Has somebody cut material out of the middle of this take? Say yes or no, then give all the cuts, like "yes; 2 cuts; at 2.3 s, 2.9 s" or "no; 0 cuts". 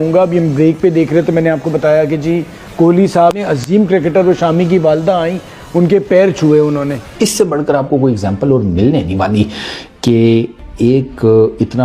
yes; 1 cut; at 7.0 s